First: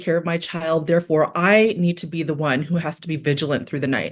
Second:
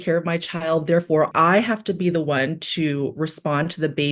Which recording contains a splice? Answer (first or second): second